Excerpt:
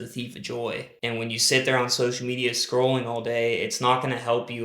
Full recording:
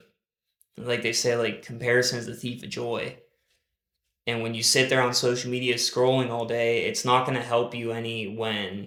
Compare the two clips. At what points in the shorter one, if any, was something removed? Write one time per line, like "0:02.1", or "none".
0:00.9